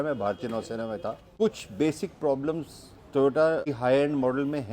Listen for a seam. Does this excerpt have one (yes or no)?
yes